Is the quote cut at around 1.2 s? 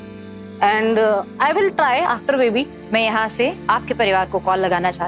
no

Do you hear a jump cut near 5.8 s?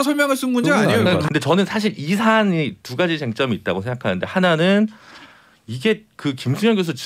no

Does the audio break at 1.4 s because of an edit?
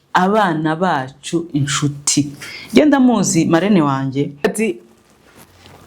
no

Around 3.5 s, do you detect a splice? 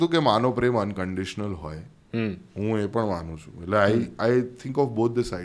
no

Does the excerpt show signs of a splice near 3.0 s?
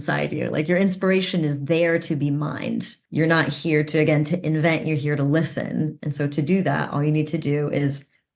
yes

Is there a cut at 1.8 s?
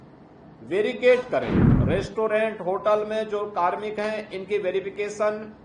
yes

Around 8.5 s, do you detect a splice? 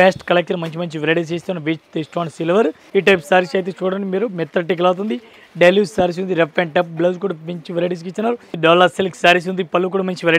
yes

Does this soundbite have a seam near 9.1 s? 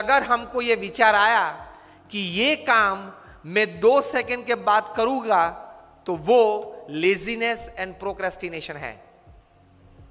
yes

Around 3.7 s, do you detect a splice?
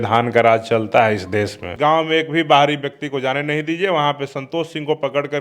no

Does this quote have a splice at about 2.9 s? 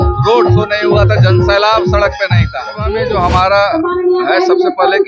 yes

